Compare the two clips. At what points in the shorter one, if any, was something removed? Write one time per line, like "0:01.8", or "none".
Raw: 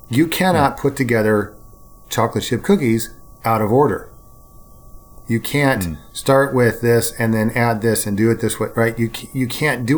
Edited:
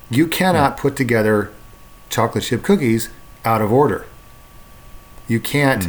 none